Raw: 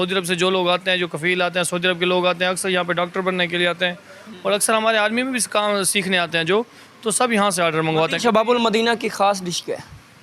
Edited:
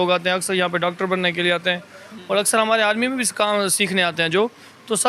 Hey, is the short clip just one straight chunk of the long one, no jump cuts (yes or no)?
yes